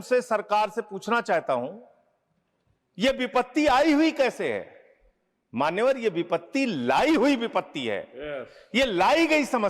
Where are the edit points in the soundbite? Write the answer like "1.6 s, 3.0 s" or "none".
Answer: none